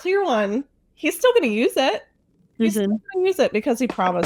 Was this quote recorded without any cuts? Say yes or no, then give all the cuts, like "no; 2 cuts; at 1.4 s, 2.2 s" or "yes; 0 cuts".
yes; 0 cuts